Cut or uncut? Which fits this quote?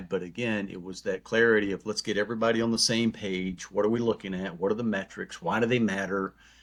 uncut